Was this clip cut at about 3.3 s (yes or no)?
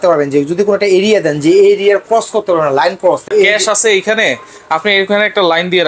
yes